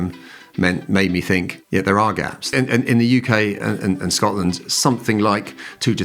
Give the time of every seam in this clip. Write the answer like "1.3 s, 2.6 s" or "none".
1.6 s, 2.5 s